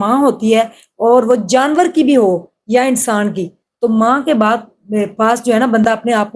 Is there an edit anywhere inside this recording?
no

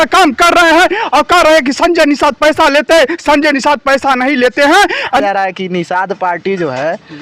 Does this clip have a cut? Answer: yes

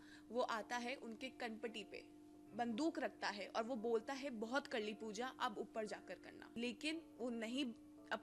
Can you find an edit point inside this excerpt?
yes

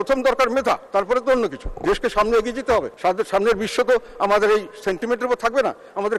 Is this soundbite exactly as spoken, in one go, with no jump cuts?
no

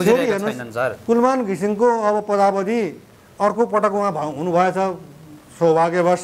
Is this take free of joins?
yes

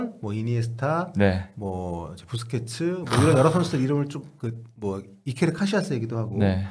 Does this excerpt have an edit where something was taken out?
no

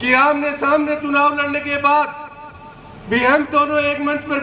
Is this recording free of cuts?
yes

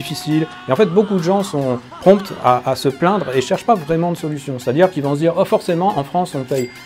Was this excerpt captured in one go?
yes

